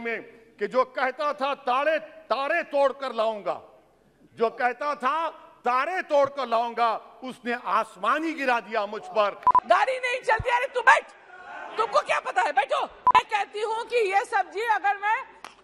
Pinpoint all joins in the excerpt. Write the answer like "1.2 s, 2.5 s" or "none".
9.5 s, 13.1 s